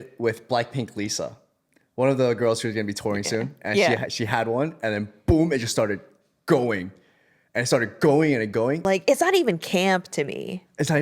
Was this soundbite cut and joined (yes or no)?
yes